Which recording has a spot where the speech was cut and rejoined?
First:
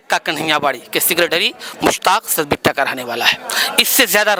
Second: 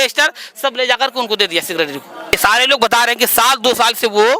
second; 1 cut; at 2.3 s

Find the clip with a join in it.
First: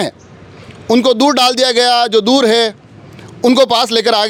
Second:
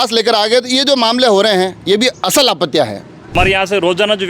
second; 1 cut; at 3.3 s

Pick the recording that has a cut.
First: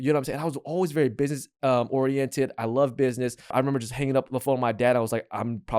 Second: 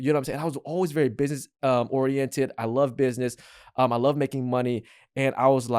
first; 1 cut; at 3.5 s

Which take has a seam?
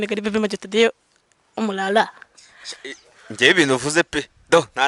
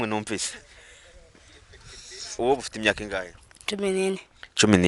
second; 1 cut; at 2.4 s

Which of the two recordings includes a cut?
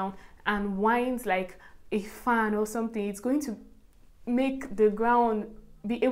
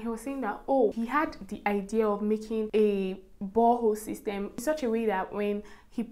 second; 3 cuts; at 0.9 s, 2.7 s, 4.6 s

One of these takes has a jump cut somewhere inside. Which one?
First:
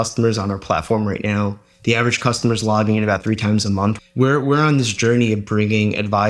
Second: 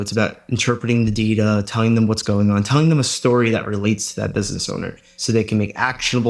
first; 1 cut; at 4.0 s

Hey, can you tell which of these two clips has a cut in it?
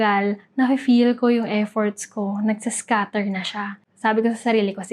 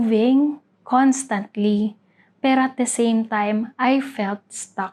first; 1 cut; at 3.9 s

